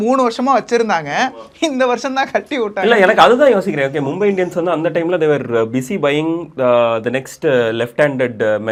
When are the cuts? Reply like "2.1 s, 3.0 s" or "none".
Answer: none